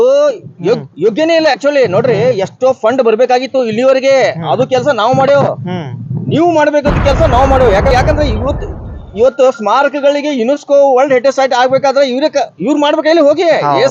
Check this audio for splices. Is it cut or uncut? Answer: cut